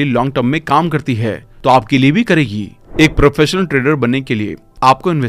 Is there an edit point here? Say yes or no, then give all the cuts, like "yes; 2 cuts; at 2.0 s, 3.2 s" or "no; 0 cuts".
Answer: yes; 1 cut; at 2.8 s